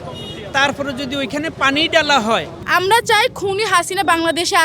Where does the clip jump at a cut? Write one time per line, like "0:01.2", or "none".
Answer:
0:02.6